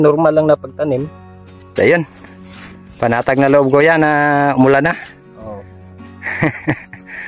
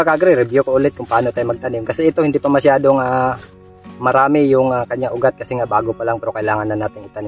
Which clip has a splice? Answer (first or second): first